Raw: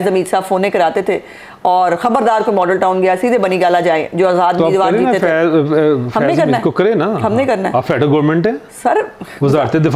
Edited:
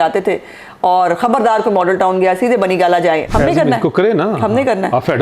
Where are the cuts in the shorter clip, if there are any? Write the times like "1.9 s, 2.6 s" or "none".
3.3 s